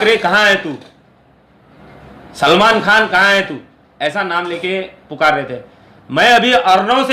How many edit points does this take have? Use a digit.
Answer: 0